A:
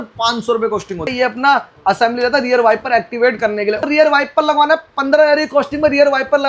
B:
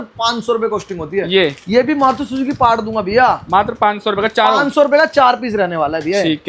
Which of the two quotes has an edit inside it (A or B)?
A